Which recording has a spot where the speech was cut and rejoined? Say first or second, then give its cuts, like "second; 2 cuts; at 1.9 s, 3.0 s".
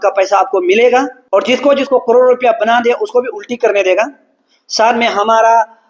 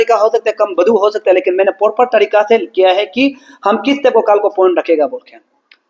first; 1 cut; at 1.2 s